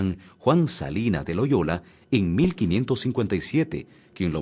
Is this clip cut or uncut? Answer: uncut